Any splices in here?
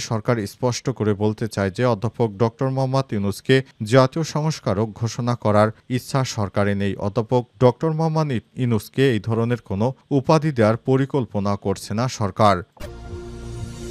yes; 1 cut; at 12.7 s

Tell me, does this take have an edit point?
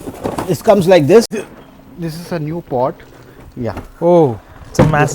yes; 1 cut; at 1.4 s

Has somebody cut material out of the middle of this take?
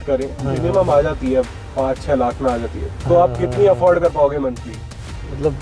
no; 0 cuts

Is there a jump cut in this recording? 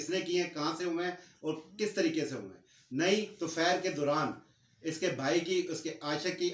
no; 0 cuts

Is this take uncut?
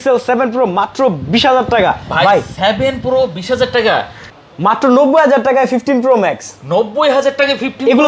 no; 1 cut; at 4.3 s

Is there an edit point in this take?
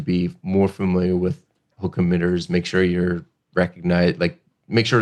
no; 0 cuts

